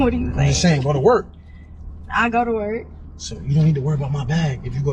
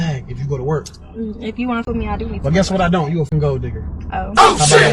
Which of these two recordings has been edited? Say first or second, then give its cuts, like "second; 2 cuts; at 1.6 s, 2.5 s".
second; 2 cuts; at 1.8 s, 3.3 s